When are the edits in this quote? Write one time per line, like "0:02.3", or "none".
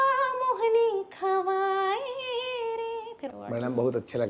0:03.3